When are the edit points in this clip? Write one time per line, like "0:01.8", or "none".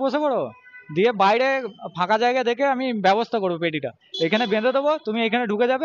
none